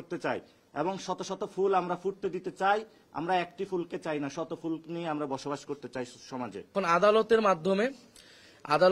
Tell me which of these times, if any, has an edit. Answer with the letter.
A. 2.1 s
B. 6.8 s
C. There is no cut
B